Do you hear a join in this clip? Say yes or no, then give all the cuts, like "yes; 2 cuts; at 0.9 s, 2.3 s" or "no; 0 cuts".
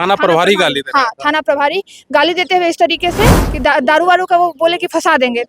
yes; 1 cut; at 3.4 s